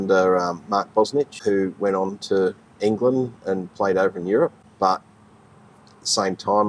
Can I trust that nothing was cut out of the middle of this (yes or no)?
no